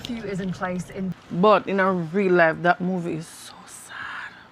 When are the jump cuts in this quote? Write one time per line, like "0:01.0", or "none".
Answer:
0:01.1